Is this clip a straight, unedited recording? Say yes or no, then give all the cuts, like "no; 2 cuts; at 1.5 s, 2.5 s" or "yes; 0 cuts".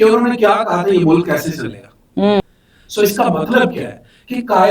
no; 1 cut; at 2.4 s